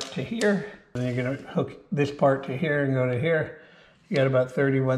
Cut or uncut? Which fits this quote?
cut